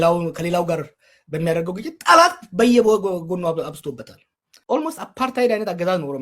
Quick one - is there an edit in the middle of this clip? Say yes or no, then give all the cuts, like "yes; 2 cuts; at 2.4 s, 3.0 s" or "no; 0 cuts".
yes; 1 cut; at 4.8 s